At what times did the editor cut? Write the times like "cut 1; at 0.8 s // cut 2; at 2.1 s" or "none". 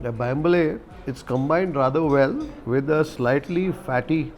cut 1; at 0.9 s